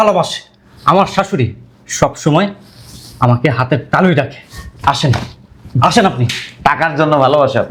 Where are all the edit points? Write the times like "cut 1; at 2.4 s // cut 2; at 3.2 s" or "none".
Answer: none